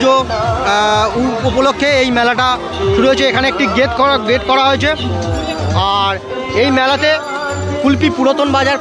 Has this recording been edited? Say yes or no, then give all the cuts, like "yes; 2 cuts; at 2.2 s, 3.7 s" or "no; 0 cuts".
no; 0 cuts